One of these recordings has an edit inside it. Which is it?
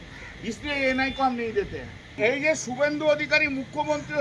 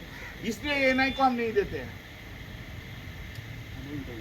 first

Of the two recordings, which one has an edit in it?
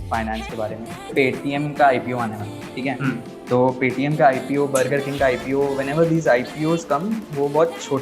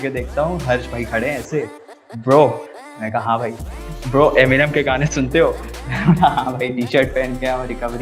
first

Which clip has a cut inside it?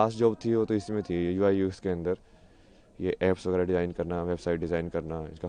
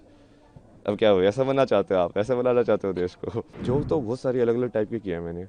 second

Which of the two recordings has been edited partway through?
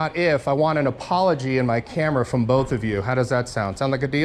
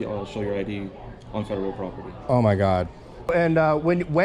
second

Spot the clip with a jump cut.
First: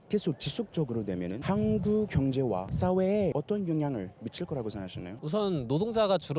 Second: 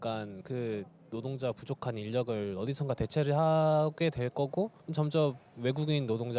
first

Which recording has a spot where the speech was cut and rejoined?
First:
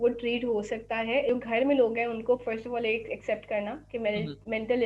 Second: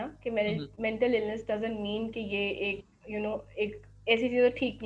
first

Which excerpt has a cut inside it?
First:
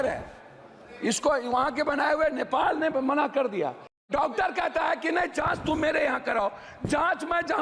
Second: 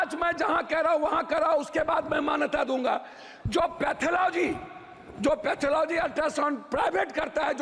first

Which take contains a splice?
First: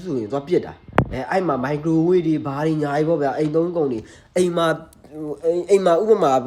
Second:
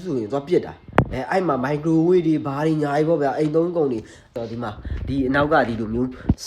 second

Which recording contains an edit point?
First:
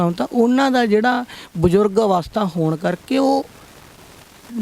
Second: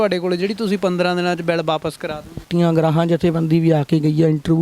second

